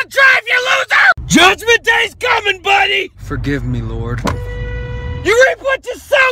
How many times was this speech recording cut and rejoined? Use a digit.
1